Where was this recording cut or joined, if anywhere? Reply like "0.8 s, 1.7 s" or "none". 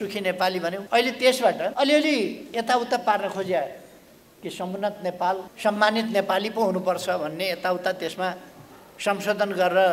0.8 s, 1.7 s, 5.5 s